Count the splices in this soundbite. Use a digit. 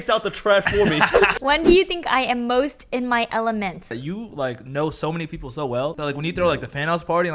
3